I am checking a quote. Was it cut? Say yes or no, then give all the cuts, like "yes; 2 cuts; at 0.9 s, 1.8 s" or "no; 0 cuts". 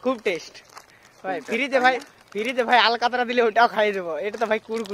no; 0 cuts